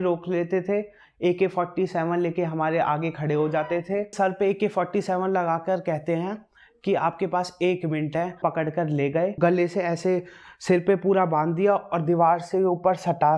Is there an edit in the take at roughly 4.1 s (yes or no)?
yes